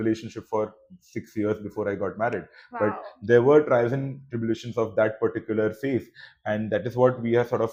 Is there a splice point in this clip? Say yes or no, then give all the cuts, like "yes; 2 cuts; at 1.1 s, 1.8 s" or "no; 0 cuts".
no; 0 cuts